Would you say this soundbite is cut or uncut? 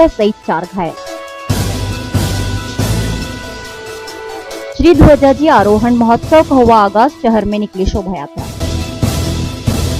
uncut